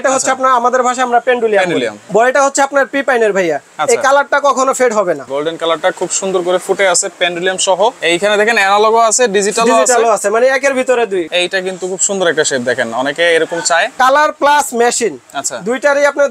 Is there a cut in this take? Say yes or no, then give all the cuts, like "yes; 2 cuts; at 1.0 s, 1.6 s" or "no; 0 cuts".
yes; 5 cuts; at 2.0 s, 5.3 s, 8.0 s, 11.3 s, 13.9 s